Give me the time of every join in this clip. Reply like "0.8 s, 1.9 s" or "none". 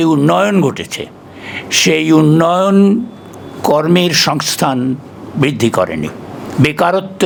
none